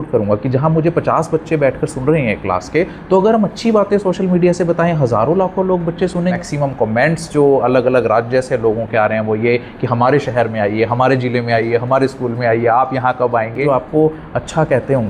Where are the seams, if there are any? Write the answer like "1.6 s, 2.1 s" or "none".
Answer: 6.4 s, 13.6 s